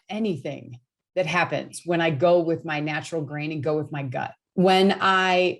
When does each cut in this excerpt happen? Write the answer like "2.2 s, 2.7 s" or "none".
4.4 s